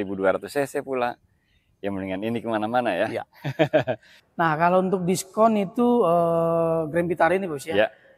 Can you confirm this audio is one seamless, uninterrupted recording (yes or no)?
no